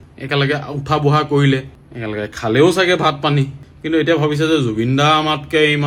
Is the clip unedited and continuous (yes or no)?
yes